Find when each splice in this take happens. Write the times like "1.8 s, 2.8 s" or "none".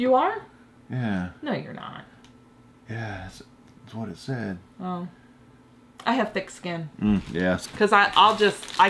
7.6 s